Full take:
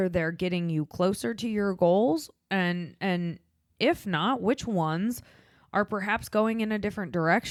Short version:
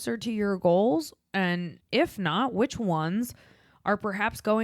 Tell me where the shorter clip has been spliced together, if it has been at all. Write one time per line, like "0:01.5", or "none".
0:01.7